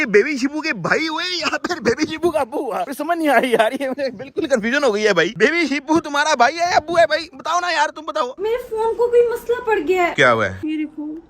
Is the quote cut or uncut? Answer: cut